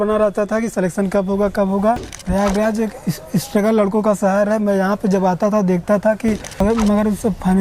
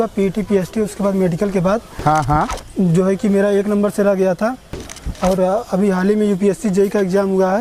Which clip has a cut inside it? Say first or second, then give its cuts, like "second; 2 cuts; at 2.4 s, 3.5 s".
first; 2 cuts; at 2.1 s, 6.6 s